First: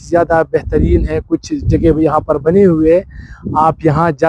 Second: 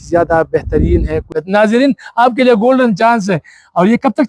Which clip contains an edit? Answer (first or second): second